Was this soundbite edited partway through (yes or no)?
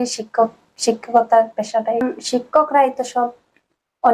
yes